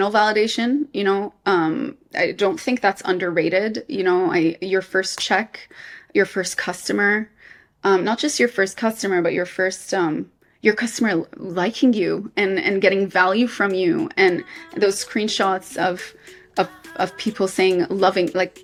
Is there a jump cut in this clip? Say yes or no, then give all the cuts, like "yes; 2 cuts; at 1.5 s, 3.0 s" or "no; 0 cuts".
no; 0 cuts